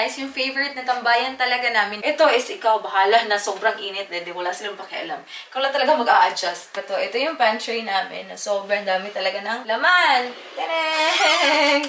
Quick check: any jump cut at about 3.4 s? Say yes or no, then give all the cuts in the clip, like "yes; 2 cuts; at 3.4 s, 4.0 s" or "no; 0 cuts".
no; 3 cuts; at 1.9 s, 6.8 s, 9.6 s